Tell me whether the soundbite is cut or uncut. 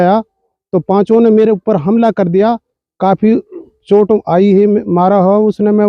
uncut